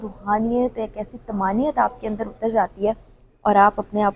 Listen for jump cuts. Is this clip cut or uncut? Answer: uncut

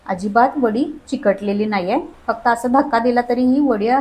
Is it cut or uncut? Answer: cut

